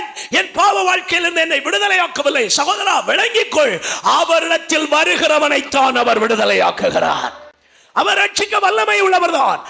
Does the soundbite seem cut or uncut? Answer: uncut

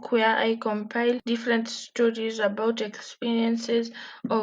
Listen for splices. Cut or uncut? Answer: cut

